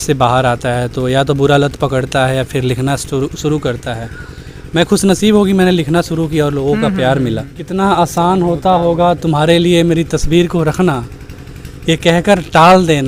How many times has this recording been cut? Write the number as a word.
one